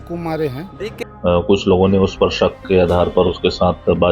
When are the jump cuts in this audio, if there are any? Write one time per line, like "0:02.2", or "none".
0:00.9